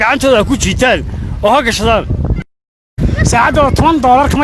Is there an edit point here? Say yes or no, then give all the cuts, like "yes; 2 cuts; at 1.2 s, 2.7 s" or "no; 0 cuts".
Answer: yes; 1 cut; at 2.6 s